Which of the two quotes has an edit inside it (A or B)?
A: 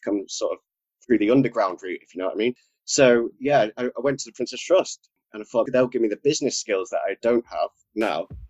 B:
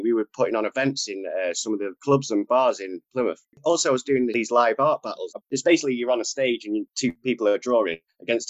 B